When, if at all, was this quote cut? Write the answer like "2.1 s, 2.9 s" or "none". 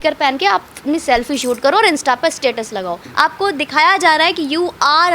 3.0 s